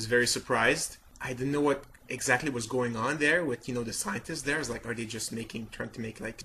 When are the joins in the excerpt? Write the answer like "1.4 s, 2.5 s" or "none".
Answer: none